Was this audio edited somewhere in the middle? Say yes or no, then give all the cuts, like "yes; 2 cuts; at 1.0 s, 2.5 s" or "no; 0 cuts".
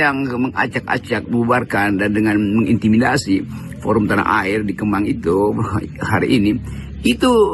no; 0 cuts